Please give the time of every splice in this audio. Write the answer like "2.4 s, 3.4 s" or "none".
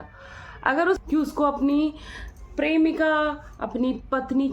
1.0 s